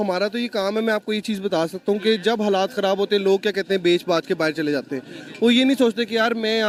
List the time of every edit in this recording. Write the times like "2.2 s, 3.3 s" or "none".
none